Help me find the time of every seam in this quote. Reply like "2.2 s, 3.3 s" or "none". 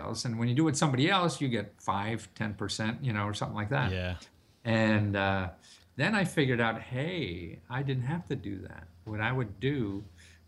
none